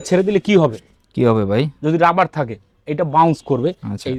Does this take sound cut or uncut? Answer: uncut